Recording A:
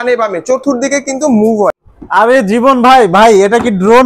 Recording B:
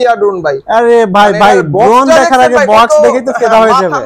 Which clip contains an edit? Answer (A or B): A